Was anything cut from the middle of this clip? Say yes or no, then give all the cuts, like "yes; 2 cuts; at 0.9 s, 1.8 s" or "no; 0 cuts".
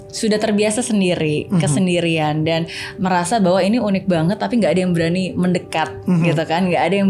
no; 0 cuts